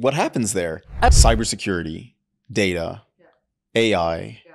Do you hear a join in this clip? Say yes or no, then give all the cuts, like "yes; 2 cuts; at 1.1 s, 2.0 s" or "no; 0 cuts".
yes; 1 cut; at 1.1 s